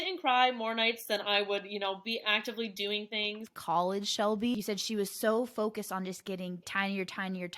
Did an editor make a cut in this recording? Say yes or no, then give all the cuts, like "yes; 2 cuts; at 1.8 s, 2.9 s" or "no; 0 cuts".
yes; 3 cuts; at 3.5 s, 4.5 s, 6.7 s